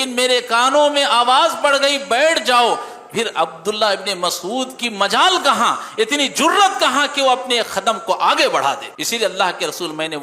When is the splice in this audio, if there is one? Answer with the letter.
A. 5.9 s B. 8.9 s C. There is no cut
B